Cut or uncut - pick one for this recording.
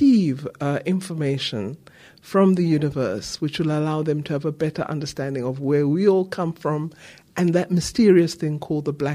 uncut